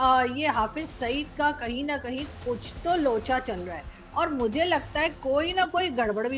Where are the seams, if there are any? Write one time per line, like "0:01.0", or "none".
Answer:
none